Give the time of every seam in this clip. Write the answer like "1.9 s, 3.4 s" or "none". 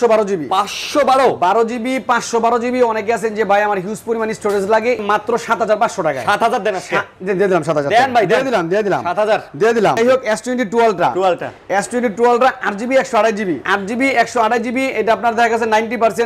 5.0 s, 10.0 s, 13.6 s